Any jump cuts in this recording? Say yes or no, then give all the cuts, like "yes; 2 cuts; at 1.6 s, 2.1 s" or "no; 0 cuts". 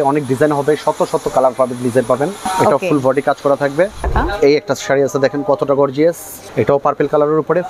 yes; 3 cuts; at 2.4 s, 4.1 s, 6.3 s